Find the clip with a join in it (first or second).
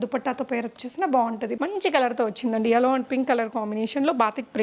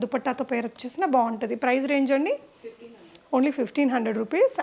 first